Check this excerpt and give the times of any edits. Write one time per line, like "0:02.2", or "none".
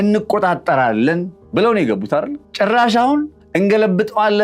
0:01.4
0:02.4
0:03.4